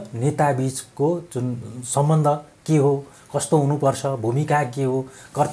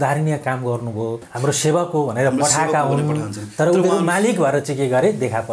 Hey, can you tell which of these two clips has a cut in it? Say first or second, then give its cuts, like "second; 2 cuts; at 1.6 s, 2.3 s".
second; 1 cut; at 1.3 s